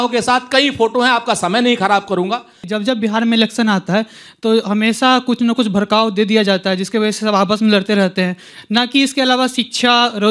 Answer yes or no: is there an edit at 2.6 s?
yes